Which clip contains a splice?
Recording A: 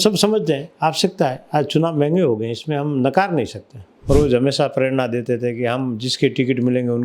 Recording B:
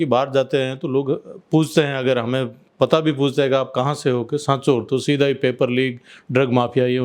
A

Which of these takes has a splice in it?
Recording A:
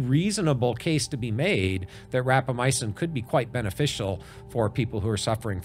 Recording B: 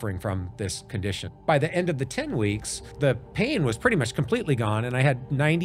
B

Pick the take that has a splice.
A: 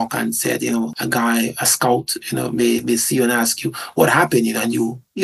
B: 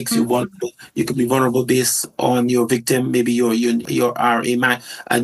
A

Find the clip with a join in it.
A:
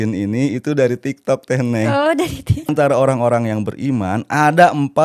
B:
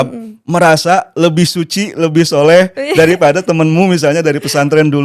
A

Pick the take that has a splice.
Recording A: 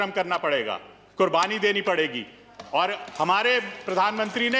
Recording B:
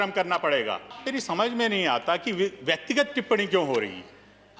B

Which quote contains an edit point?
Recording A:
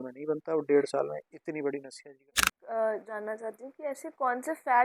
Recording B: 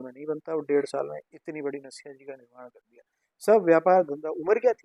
A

